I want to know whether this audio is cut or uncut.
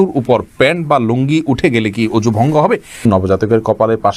cut